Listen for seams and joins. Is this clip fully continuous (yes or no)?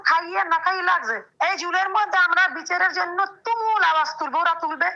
no